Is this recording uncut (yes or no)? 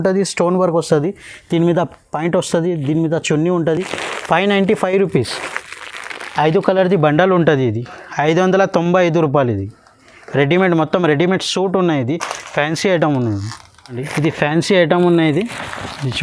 yes